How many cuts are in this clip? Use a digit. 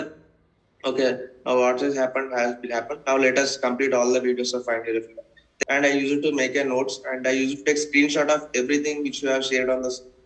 1